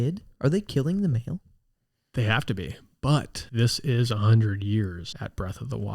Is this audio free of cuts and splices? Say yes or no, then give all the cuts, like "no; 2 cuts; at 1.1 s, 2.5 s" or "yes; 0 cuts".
no; 2 cuts; at 3.4 s, 5.1 s